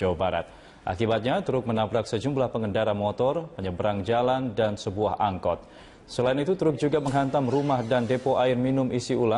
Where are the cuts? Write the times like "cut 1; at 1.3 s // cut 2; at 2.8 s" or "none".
cut 1; at 2.3 s